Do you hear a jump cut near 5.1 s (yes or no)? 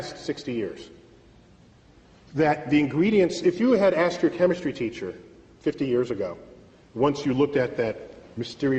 yes